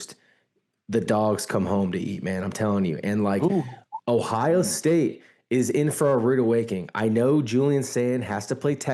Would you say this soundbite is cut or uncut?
uncut